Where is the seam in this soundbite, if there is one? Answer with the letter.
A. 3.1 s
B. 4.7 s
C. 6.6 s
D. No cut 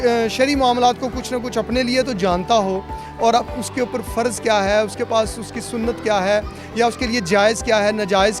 D